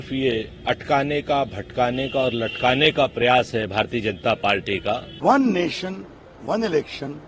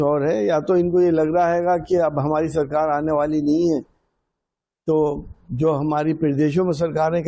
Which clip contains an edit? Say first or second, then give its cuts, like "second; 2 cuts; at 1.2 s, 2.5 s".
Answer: first; 1 cut; at 5.1 s